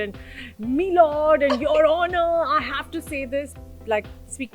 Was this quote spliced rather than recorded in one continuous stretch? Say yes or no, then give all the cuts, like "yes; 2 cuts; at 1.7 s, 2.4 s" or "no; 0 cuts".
yes; 1 cut; at 3.6 s